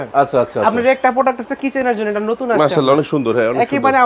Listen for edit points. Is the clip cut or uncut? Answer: uncut